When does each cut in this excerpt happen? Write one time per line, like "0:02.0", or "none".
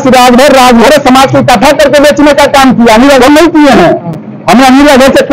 none